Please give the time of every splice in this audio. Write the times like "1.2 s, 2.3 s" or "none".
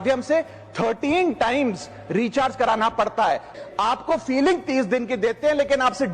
3.5 s

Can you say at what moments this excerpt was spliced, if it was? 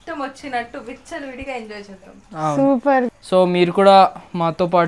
none

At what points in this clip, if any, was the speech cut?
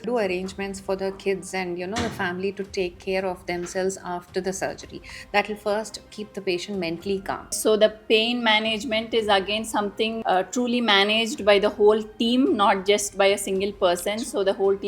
7.6 s

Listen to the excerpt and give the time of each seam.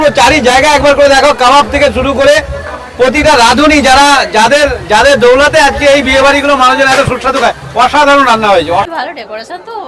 8.9 s

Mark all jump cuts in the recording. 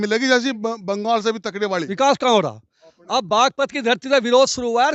1.7 s

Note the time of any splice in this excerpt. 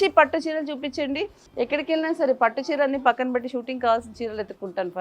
1.4 s

